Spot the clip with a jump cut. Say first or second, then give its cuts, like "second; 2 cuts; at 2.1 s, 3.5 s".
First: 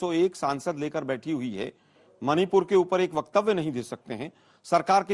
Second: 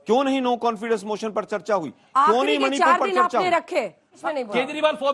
second; 1 cut; at 4.1 s